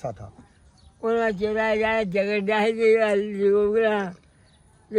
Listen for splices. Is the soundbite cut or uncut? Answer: uncut